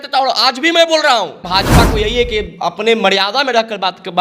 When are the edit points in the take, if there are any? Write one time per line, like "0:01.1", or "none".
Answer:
0:01.5